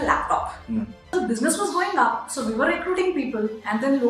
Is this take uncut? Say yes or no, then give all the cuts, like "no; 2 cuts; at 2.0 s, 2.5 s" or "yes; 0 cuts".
no; 1 cut; at 1.1 s